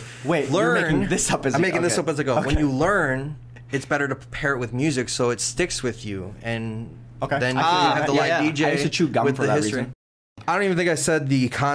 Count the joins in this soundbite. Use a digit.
1